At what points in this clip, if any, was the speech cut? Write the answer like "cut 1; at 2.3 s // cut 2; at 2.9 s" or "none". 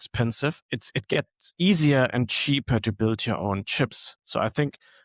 cut 1; at 1.1 s